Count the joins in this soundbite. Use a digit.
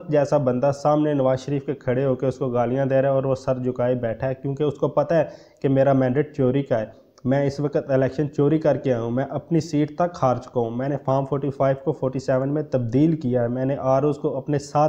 0